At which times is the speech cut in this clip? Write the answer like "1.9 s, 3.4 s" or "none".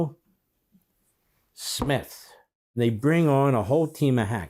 2.7 s